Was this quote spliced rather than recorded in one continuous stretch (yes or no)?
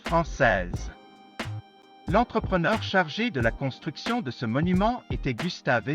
yes